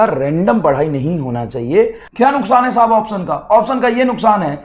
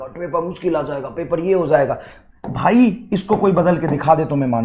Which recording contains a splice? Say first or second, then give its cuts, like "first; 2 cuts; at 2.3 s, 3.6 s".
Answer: first; 1 cut; at 2.0 s